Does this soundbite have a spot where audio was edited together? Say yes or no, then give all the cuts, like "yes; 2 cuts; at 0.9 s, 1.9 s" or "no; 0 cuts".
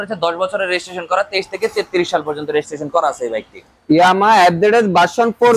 no; 0 cuts